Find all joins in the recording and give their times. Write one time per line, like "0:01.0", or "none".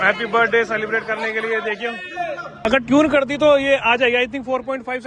0:02.5